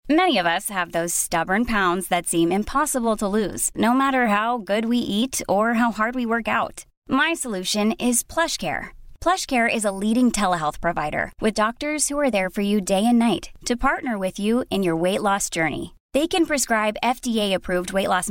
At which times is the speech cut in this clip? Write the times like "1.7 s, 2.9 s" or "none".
none